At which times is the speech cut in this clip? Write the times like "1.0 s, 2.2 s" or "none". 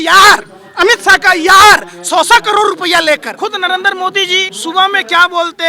3.4 s, 4.5 s